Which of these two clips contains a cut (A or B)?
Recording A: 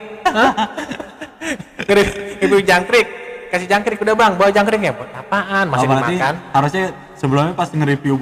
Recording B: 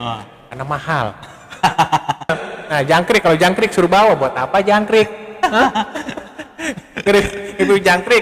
B